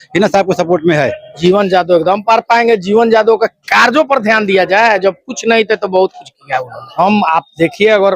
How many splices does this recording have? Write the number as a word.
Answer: two